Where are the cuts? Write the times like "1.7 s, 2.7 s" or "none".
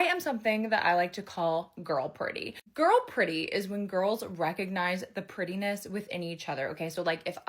none